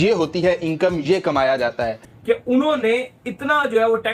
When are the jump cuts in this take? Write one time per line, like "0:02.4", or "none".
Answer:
0:01.8

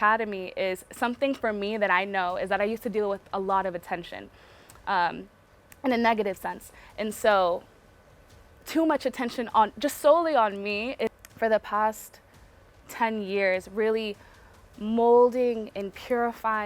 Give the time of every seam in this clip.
0:11.1

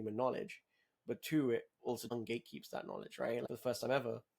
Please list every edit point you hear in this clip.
0:02.1
0:03.5

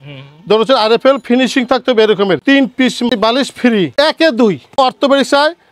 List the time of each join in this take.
0:02.4
0:03.9
0:04.7

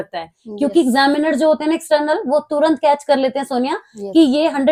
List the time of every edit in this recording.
none

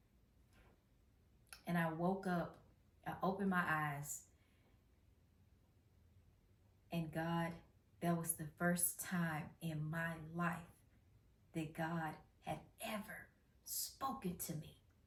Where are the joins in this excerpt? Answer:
none

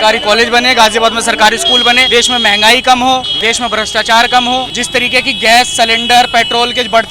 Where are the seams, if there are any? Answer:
0:02.0
0:03.3
0:04.8

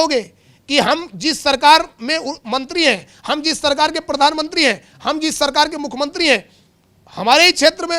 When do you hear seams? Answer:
none

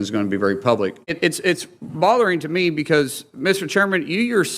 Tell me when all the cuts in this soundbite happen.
0:01.1

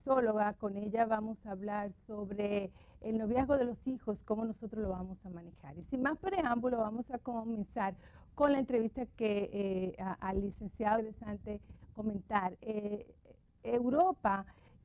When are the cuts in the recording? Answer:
none

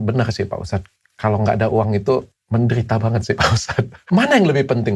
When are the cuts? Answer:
0:04.0

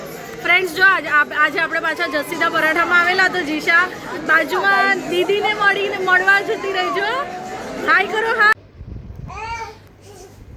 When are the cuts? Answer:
0:08.5

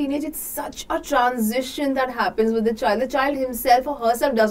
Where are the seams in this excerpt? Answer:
none

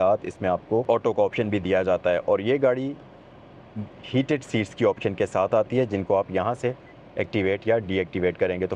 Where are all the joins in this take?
none

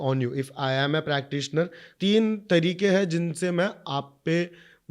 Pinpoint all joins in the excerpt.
0:01.8

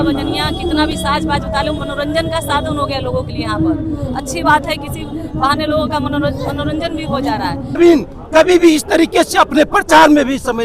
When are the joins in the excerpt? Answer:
0:07.8

